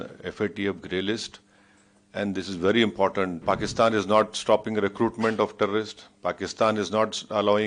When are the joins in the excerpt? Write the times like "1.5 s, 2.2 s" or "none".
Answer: 3.4 s